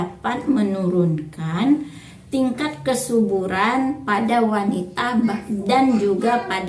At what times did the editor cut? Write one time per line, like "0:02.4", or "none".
none